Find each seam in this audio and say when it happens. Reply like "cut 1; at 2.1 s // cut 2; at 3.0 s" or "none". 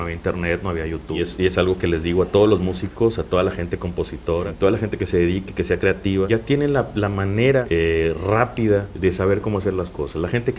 cut 1; at 1.2 s // cut 2; at 4.5 s // cut 3; at 6.3 s // cut 4; at 7.7 s // cut 5; at 8.9 s